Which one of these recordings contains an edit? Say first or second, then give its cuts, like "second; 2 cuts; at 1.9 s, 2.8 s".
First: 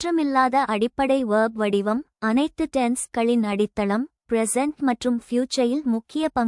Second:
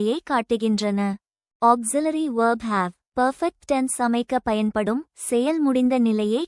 second; 2 cuts; at 1.4 s, 3.0 s